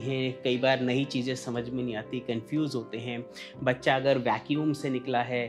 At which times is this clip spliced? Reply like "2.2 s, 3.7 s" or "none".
none